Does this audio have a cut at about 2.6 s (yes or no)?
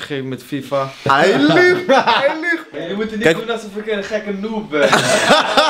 yes